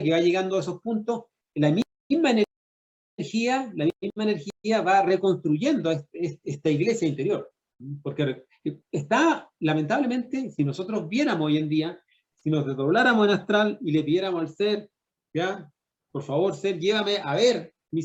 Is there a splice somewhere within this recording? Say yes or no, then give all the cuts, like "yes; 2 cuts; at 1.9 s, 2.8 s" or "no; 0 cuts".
no; 0 cuts